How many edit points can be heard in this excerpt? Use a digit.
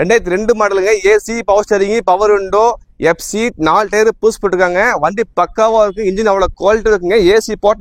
0